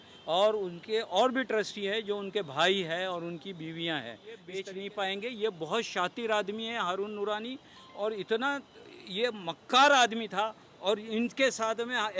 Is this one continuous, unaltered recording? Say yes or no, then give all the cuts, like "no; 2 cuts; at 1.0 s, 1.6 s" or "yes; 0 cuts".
no; 1 cut; at 4.4 s